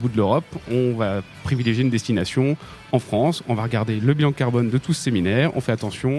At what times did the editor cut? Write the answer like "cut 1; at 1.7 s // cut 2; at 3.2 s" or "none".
none